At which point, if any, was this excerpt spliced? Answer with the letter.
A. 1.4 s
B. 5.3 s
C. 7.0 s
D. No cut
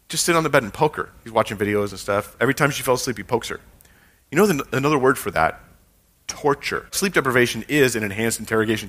C